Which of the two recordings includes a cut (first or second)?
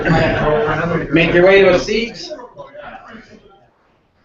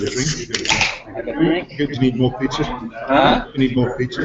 first